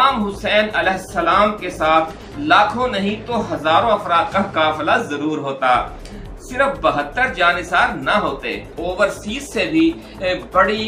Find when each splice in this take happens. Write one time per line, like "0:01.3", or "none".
0:08.7